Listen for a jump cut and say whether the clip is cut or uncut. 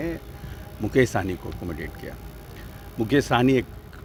uncut